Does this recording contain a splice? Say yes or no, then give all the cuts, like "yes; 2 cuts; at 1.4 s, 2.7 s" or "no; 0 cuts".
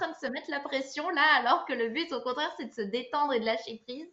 no; 0 cuts